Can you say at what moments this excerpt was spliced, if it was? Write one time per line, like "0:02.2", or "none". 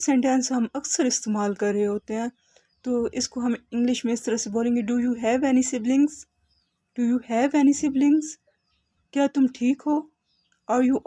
none